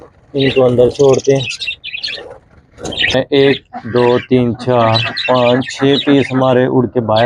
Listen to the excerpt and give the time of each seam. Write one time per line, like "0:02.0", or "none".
0:03.1